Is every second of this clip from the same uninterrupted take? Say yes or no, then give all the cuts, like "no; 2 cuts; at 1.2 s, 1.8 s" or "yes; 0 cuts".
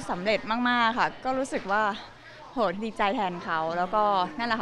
yes; 0 cuts